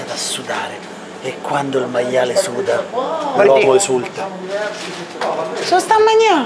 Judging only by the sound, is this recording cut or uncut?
uncut